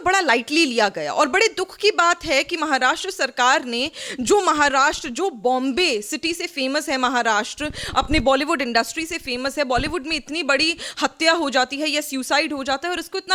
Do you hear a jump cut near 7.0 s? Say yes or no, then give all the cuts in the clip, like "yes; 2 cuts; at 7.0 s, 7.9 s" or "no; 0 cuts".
no; 0 cuts